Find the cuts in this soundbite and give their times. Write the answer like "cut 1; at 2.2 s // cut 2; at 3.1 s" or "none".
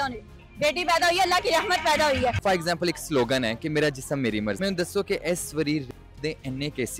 cut 1; at 2.4 s // cut 2; at 4.6 s